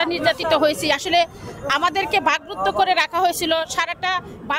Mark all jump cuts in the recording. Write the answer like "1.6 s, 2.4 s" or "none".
none